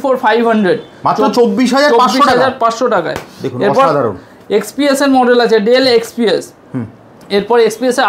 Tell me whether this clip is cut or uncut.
uncut